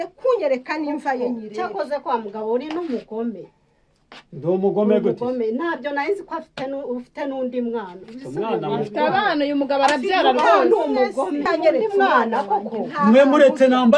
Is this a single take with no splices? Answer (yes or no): no